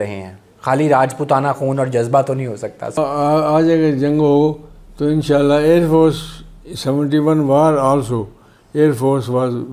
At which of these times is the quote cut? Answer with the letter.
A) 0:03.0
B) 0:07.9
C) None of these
A